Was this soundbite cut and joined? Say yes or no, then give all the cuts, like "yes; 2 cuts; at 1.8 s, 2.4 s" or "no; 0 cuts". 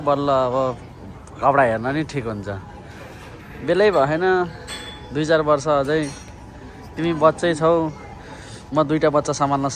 no; 0 cuts